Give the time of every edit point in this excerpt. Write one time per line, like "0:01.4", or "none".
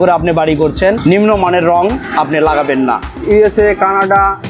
0:01.0
0:03.1

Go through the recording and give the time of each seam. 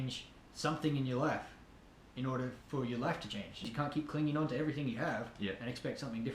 0:03.6

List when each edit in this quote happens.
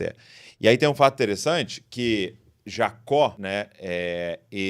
0:03.4

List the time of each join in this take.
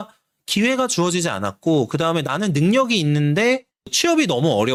none

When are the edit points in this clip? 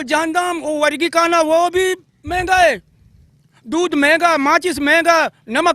none

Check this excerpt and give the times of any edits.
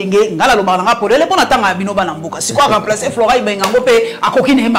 none

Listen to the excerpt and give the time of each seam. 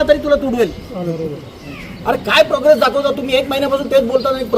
0:01.3

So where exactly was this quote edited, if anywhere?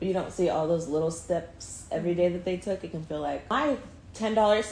0:03.4

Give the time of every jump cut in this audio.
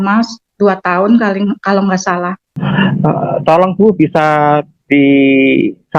0:02.6

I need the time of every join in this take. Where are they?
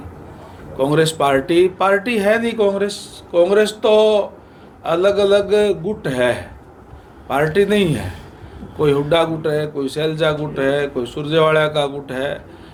none

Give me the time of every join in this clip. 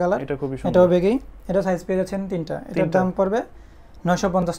none

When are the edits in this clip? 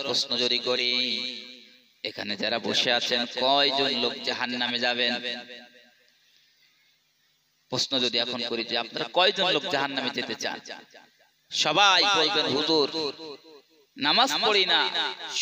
none

